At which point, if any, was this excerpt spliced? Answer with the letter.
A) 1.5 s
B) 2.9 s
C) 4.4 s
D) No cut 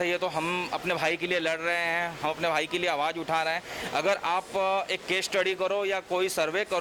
D